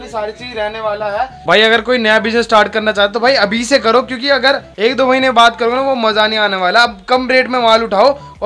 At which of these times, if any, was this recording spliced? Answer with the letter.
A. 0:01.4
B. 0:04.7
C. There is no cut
A